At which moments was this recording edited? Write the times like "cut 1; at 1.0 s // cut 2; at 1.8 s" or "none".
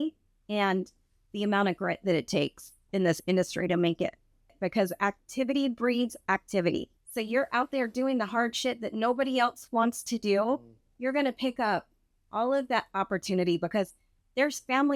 cut 1; at 4.6 s // cut 2; at 7.0 s